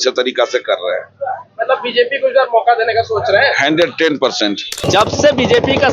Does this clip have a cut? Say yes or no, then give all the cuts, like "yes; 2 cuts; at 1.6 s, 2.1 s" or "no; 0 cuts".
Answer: yes; 1 cut; at 4.8 s